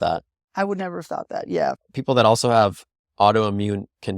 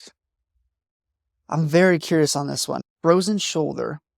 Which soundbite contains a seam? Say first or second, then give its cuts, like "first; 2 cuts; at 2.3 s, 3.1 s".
first; 1 cut; at 1.8 s